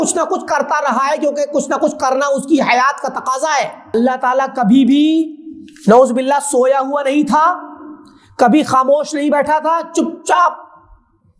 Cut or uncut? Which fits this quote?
cut